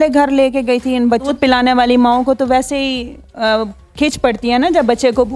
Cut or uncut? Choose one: cut